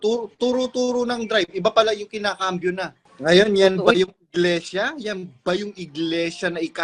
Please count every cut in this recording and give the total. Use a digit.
1